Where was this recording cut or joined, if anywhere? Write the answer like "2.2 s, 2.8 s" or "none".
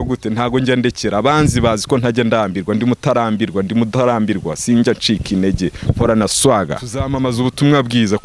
7.0 s